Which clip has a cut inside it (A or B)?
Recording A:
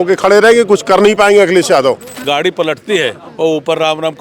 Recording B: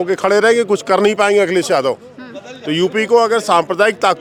A